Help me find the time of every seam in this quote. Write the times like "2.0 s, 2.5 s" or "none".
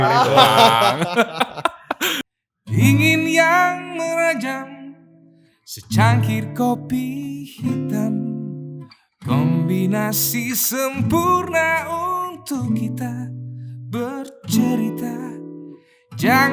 2.2 s